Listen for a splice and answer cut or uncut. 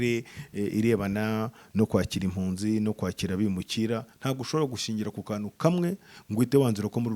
uncut